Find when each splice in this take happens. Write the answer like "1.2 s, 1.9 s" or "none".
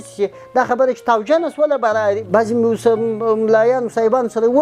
2.2 s